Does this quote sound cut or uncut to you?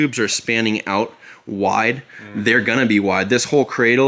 uncut